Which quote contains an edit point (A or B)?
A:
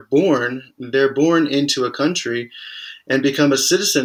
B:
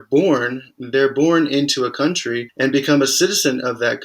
B